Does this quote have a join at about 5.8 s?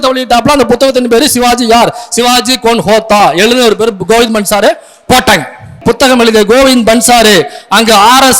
yes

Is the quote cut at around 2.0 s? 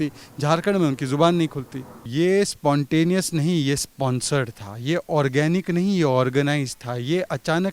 yes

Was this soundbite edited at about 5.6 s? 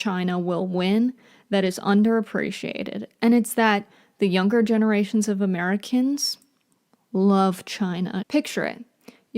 no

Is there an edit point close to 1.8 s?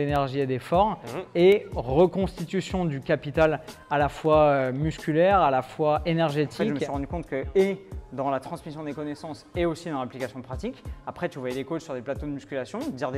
no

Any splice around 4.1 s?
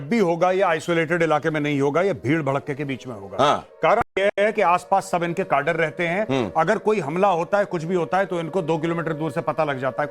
yes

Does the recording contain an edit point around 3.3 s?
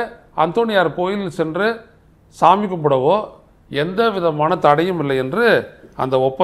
no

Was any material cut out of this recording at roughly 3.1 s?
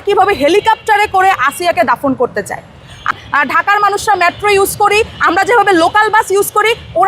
yes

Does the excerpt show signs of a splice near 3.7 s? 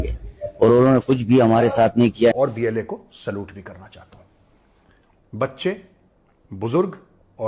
no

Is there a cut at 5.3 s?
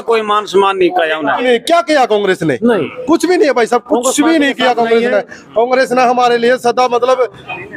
no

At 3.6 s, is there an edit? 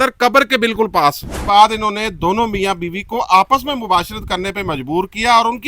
no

